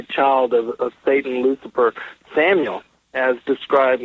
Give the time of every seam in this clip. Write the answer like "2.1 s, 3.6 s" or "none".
1.7 s

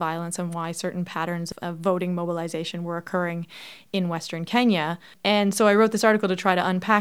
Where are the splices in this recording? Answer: 1.5 s, 5.0 s

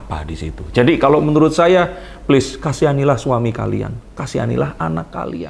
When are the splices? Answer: none

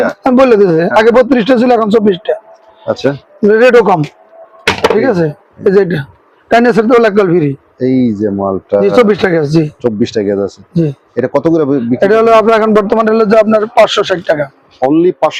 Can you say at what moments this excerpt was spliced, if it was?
none

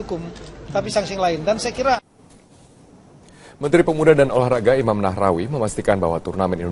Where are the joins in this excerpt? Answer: 3.0 s

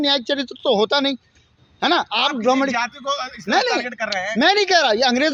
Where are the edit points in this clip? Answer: none

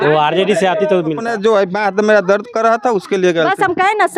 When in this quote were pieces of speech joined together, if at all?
1.2 s

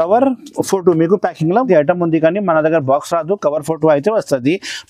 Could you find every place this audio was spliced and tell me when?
1.7 s

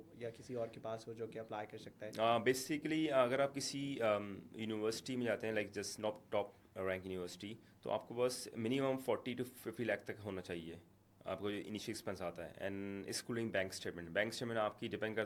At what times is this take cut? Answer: none

